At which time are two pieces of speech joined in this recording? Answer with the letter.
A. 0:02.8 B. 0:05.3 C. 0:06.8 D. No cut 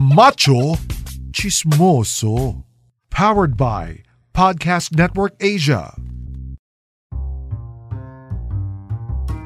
C